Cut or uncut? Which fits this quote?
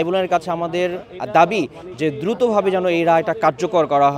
uncut